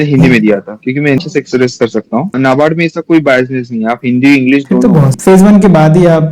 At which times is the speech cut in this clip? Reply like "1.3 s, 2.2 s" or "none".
1.2 s, 2.3 s, 5.1 s